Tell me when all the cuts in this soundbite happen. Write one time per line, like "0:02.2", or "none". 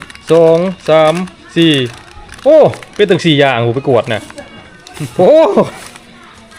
none